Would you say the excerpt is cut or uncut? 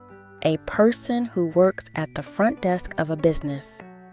uncut